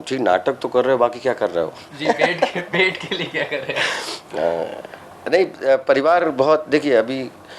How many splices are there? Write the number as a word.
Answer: zero